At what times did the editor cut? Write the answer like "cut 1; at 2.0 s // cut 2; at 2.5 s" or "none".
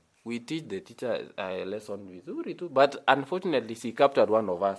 none